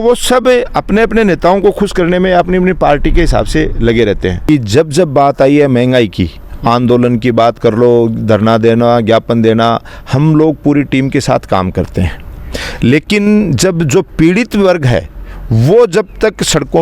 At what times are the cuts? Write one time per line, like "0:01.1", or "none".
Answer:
0:04.4